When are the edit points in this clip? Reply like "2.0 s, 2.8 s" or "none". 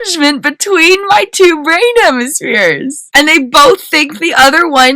3.0 s

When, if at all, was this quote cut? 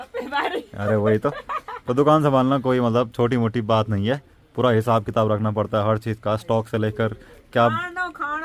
none

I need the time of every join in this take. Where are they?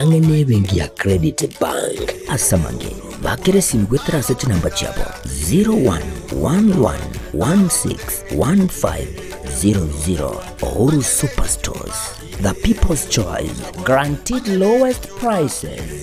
none

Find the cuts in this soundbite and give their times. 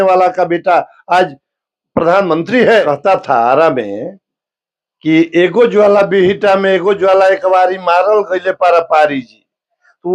2.8 s

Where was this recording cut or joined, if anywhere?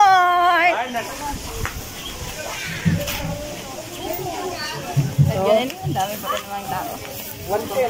1.1 s

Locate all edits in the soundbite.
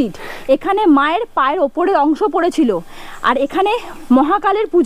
none

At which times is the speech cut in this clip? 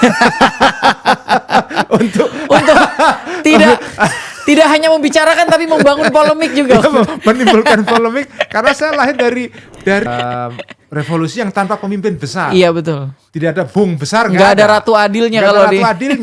10.1 s

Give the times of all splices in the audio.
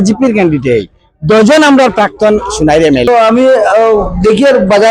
3.1 s

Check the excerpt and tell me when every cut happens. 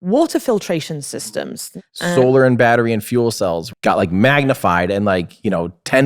1.6 s, 3.7 s

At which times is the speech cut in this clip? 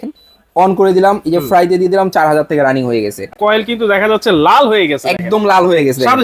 3.2 s

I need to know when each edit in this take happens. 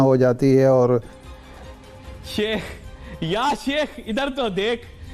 1.4 s

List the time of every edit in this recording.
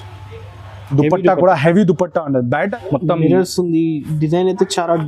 2.8 s

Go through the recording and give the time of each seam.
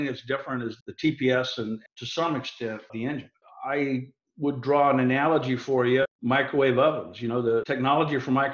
0.8 s, 1.9 s, 2.9 s, 6.1 s, 7.7 s

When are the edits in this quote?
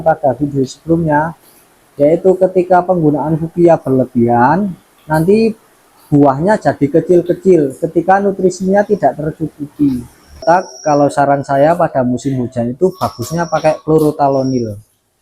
10.4 s

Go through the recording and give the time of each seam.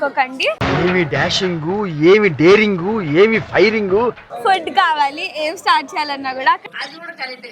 4.3 s

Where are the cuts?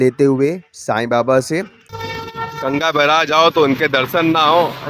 1.8 s

